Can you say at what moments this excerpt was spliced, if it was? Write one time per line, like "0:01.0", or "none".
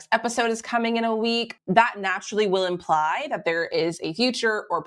0:01.5